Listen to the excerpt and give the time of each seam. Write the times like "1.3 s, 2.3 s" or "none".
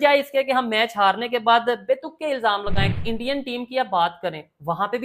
3.0 s